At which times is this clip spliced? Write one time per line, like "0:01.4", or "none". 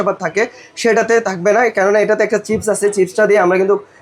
none